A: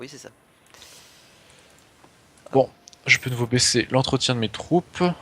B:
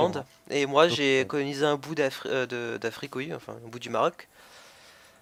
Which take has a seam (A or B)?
A